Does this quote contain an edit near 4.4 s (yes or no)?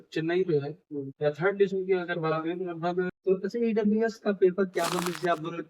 no